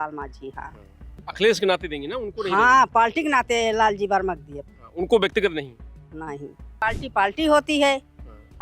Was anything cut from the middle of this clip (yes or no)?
yes